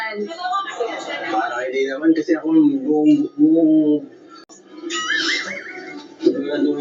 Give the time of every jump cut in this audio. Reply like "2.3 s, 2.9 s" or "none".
4.6 s